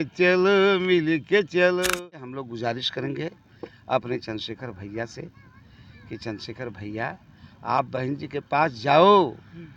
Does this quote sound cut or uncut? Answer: cut